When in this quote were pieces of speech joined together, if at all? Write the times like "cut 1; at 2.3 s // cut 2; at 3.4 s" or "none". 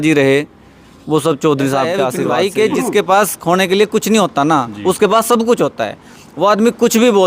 cut 1; at 2.2 s